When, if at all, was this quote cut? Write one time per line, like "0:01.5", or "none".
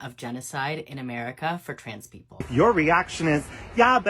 0:02.5